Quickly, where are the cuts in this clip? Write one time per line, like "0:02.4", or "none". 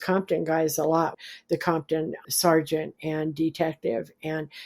0:01.2
0:02.2